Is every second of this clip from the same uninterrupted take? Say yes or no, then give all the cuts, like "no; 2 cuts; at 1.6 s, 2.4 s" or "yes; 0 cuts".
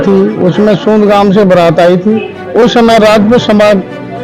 no; 1 cut; at 2.4 s